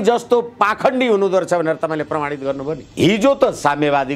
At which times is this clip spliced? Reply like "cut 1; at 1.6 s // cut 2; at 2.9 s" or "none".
cut 1; at 2.9 s